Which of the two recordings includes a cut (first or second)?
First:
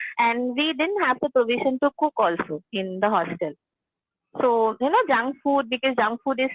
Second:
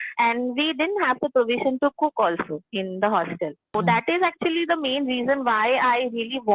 second